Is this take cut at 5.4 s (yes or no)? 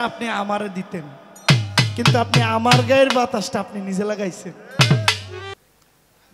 yes